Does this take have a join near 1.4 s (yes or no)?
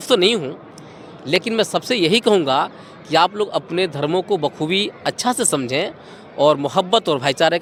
no